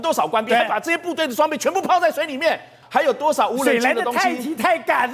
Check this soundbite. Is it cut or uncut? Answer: cut